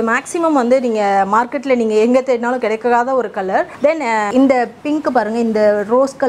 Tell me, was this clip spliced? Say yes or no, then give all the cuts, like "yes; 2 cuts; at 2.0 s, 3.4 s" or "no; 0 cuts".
no; 0 cuts